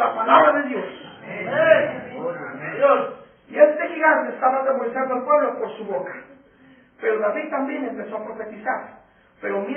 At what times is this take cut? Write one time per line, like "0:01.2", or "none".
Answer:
none

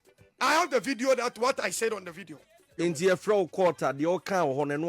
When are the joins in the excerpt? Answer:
0:02.7

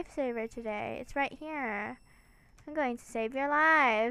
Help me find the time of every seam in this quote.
none

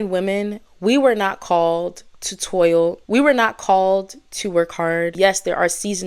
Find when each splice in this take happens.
0:03.0

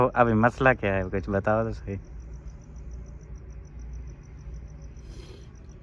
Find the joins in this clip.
none

